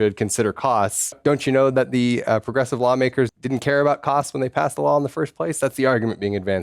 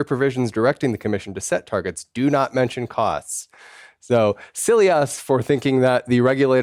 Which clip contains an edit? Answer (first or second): first